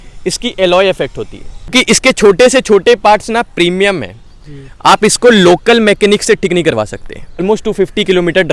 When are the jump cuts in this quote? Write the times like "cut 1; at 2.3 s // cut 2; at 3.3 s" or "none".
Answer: cut 1; at 1.7 s // cut 2; at 7.4 s